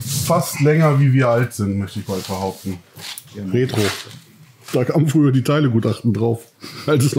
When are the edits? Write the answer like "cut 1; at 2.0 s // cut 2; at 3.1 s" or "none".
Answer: cut 1; at 2.9 s